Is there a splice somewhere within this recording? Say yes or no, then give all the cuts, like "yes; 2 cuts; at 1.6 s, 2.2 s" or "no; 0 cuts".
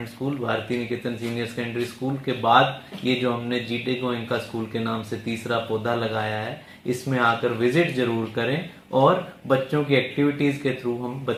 no; 0 cuts